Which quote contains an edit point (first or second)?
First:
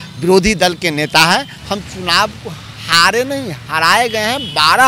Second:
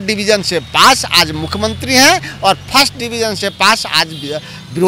first